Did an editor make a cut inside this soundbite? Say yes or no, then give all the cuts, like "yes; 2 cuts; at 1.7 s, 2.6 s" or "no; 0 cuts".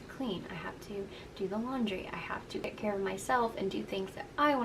yes; 1 cut; at 2.6 s